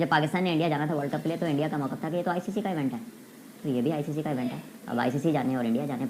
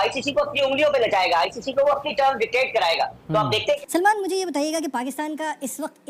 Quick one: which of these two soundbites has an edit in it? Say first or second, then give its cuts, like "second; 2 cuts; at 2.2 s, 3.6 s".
second; 1 cut; at 3.8 s